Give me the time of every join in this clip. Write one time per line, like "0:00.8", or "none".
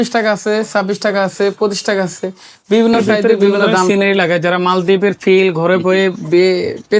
0:03.9